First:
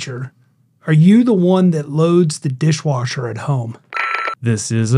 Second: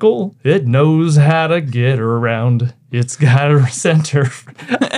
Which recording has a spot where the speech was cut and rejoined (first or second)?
first